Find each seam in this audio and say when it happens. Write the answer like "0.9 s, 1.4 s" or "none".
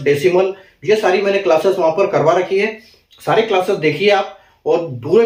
none